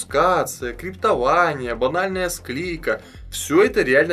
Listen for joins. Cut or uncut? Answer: uncut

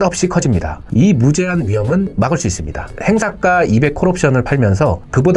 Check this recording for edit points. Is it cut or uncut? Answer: cut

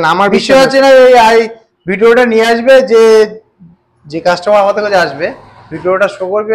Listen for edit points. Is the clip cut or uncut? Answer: uncut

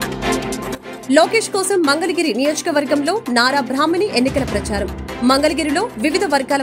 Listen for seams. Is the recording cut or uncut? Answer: cut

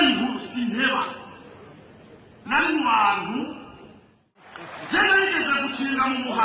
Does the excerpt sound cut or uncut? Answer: cut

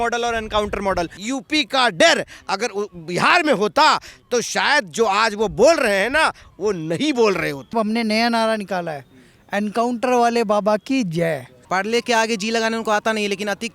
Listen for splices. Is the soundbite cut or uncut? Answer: cut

